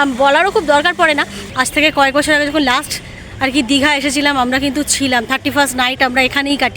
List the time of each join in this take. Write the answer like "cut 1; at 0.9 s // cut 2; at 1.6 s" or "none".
cut 1; at 1.3 s